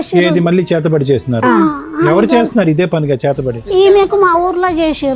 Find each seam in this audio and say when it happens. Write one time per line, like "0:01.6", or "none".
0:03.5